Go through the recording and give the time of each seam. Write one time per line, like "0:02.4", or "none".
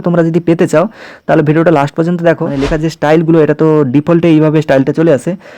0:02.5